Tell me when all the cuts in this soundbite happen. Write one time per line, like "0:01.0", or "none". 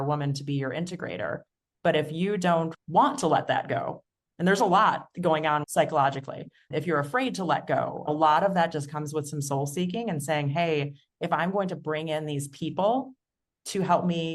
0:02.8
0:05.7
0:08.1